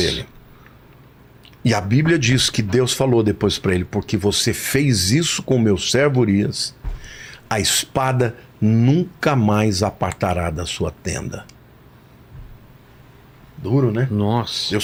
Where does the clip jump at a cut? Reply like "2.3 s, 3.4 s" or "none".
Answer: none